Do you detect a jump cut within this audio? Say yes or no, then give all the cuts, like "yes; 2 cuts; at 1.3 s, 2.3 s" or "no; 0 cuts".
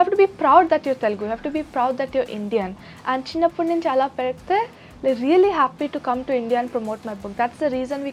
no; 0 cuts